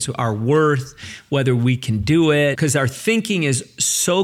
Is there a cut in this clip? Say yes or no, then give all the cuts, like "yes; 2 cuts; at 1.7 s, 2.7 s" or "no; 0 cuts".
yes; 1 cut; at 2.6 s